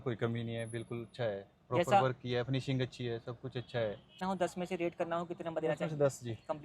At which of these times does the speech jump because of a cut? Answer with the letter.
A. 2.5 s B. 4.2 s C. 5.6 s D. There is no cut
B